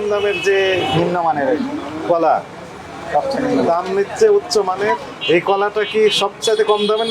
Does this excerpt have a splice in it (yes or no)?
yes